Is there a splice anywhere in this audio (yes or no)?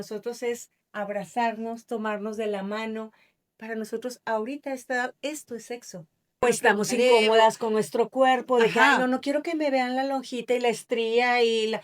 yes